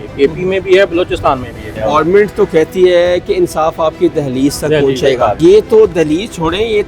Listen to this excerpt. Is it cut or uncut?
cut